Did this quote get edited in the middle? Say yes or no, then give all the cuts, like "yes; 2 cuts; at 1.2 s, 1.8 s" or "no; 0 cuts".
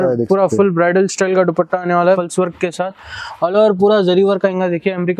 yes; 1 cut; at 2.0 s